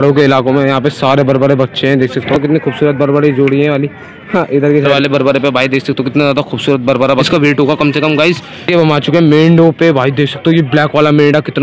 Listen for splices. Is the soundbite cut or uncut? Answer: cut